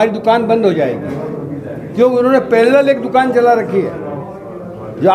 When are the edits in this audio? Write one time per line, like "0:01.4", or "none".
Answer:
none